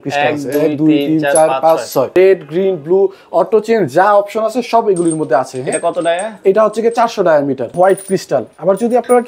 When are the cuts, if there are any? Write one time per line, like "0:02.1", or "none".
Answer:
0:02.1
0:07.8